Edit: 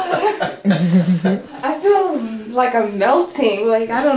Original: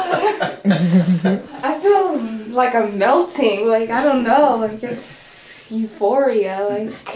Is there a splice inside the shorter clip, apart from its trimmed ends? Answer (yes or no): no